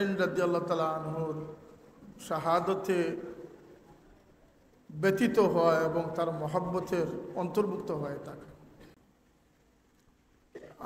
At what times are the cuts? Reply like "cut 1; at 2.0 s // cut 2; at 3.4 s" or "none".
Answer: cut 1; at 9.0 s